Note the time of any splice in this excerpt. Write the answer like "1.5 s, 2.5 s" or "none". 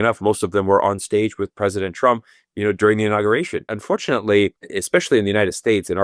3.7 s, 4.7 s

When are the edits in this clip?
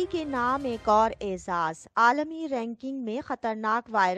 none

